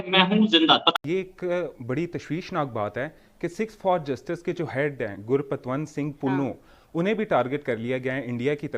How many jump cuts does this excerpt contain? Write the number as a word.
one